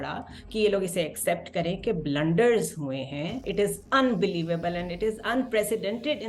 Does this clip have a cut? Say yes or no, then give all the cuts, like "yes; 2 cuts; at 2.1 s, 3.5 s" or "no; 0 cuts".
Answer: yes; 1 cut; at 3.4 s